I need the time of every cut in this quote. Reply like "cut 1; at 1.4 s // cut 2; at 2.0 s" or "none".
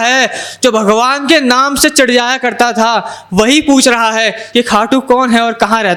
none